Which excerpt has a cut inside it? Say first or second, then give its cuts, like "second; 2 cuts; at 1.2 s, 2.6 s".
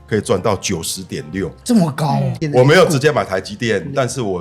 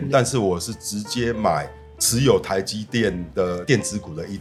first; 1 cut; at 2.3 s